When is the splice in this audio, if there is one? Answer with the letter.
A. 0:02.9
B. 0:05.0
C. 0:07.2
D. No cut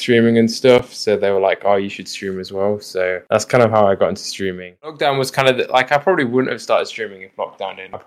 B